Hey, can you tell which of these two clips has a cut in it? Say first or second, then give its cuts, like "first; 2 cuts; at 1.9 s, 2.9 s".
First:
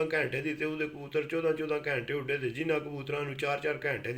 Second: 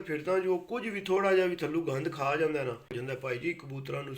second; 1 cut; at 2.9 s